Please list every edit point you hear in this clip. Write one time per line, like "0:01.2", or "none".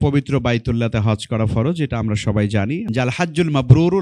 0:02.8